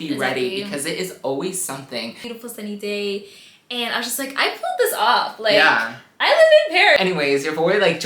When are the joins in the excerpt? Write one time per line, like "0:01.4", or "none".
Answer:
0:02.2
0:07.0

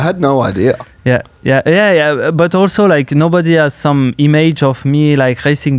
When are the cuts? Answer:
none

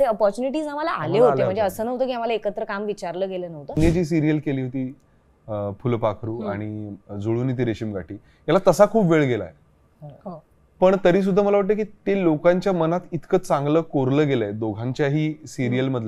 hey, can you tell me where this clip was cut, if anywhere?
0:03.8

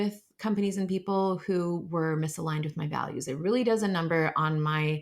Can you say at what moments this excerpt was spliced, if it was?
none

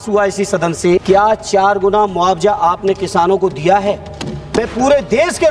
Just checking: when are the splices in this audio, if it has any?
0:01.0
0:04.6

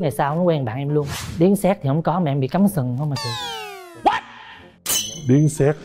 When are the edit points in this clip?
0:01.1

